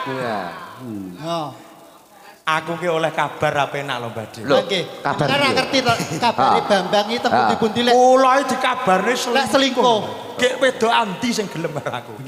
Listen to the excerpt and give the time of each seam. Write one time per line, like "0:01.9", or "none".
none